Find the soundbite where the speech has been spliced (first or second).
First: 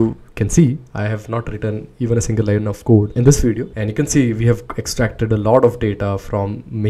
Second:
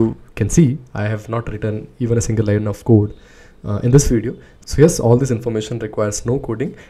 first